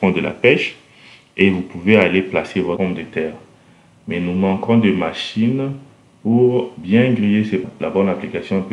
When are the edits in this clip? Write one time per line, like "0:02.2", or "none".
0:02.8
0:07.6